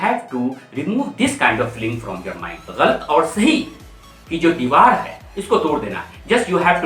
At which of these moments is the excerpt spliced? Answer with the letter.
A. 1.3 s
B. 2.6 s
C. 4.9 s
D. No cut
B